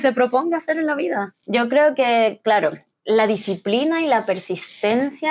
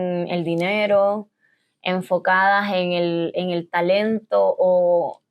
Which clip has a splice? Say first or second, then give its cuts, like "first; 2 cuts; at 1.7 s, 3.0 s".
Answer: first; 2 cuts; at 1.4 s, 2.9 s